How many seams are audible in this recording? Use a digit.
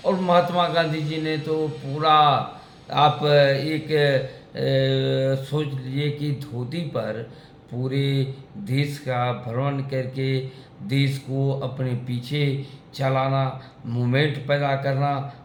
0